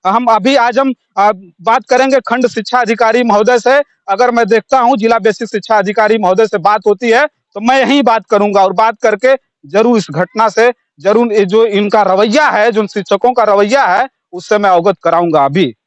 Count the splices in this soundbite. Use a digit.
0